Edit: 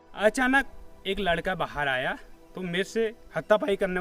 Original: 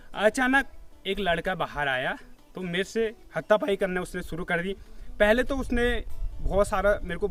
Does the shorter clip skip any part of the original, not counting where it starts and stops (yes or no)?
no